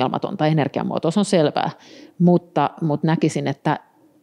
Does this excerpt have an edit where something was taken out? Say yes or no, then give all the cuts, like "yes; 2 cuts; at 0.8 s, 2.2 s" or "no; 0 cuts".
no; 0 cuts